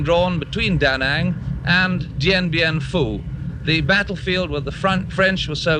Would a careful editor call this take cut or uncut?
uncut